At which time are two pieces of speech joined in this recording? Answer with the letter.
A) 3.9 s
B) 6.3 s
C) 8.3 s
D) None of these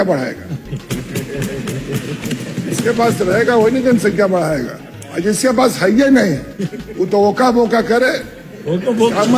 D